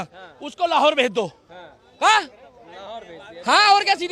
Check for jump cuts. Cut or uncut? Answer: uncut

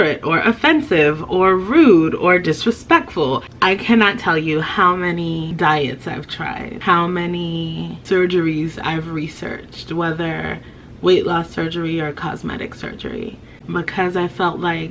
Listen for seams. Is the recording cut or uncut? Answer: cut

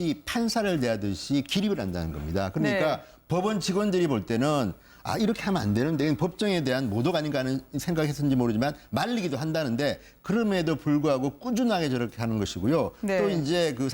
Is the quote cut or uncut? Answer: cut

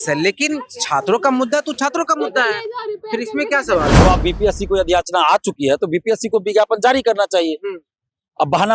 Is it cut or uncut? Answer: cut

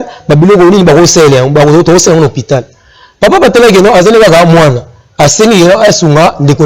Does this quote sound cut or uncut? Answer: uncut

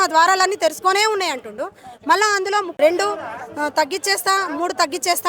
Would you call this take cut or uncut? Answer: cut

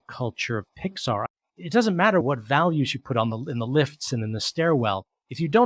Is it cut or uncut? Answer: cut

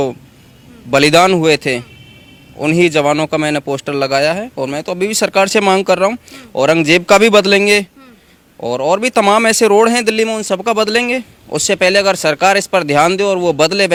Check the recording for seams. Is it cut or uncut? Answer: uncut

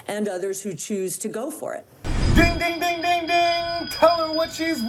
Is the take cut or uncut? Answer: uncut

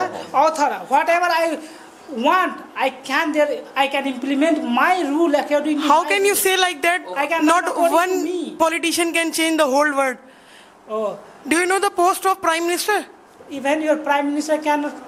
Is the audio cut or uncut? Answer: uncut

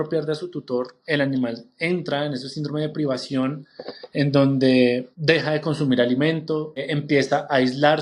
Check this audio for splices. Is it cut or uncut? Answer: cut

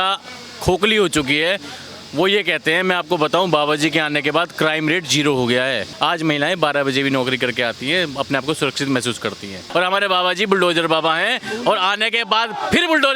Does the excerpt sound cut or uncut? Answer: cut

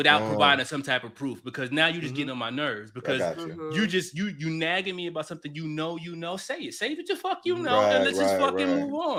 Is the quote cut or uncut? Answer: uncut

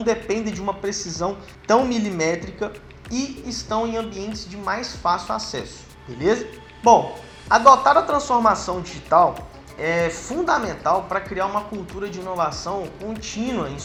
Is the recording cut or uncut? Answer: uncut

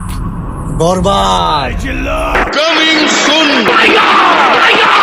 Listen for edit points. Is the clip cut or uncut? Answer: uncut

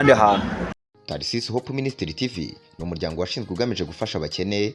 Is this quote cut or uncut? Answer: cut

